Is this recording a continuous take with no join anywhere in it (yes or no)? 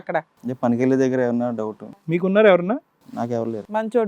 no